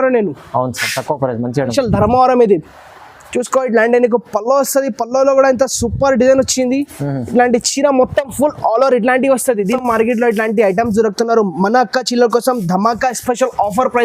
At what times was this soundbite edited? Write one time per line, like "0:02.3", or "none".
0:01.7
0:09.8

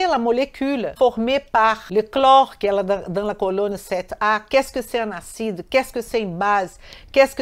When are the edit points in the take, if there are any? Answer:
0:00.9
0:01.8

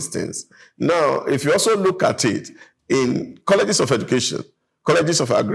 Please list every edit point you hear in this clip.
none

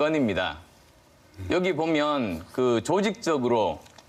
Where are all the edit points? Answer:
none

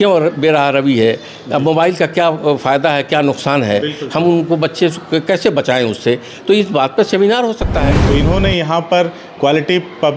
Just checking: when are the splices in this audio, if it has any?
0:07.9

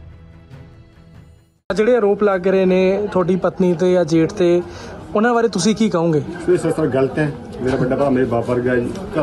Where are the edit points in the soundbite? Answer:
0:01.0

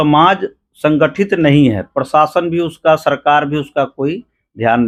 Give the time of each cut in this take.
none

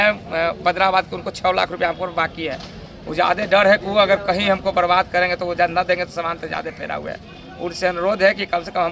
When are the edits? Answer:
none

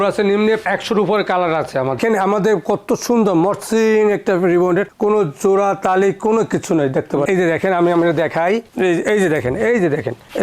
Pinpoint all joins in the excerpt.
0:02.0
0:07.3

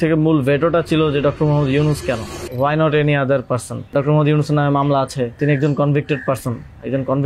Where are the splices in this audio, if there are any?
0:02.4
0:03.9
0:05.4

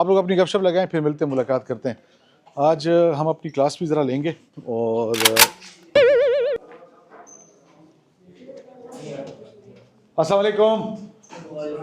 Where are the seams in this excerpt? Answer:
none

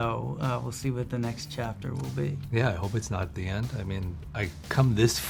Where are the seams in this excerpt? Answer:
none

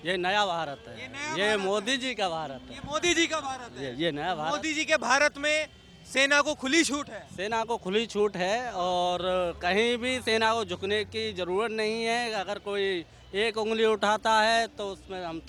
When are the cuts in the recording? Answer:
none

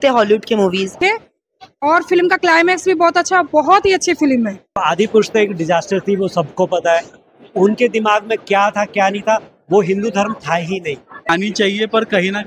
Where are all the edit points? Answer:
0:01.0
0:04.8
0:11.3

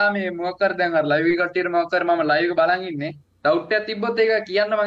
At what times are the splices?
none

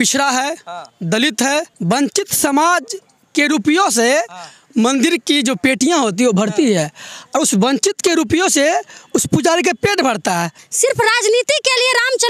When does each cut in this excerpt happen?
0:01.7
0:10.6

